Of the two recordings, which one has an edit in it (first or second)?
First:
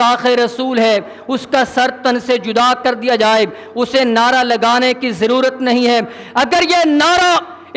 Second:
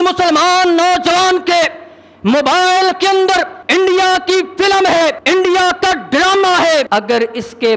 second